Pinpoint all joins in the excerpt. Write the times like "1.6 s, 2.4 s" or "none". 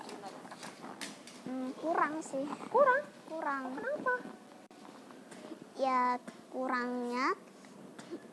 none